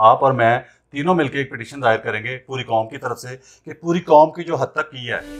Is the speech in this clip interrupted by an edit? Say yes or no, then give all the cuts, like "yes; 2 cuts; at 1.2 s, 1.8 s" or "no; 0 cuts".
no; 0 cuts